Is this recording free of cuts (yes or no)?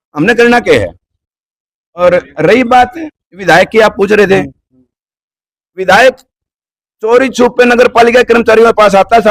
yes